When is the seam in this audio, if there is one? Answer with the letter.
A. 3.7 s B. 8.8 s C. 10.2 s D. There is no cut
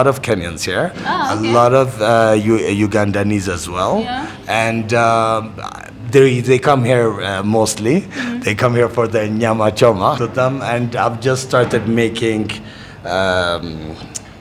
C